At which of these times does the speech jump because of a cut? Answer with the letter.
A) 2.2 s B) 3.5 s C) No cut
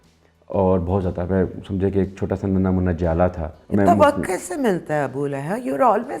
B